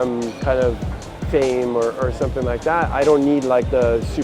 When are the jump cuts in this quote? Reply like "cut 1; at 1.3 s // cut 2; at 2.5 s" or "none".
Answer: none